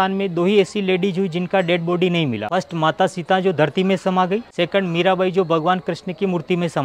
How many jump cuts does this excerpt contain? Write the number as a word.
two